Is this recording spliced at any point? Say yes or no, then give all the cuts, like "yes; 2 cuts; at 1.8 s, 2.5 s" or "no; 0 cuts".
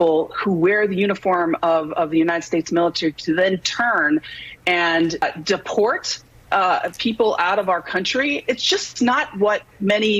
no; 0 cuts